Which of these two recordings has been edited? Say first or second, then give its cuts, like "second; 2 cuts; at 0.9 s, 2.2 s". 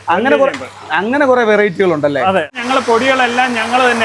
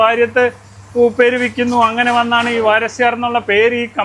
first; 1 cut; at 2.6 s